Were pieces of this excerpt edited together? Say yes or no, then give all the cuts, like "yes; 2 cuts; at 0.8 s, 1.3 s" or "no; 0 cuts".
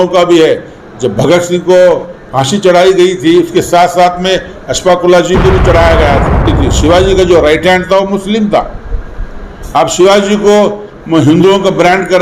yes; 1 cut; at 6.5 s